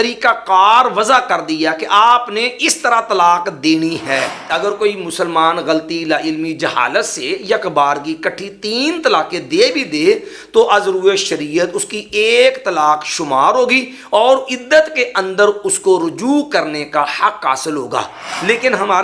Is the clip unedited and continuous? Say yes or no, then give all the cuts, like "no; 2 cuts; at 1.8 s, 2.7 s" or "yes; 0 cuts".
no; 1 cut; at 4.4 s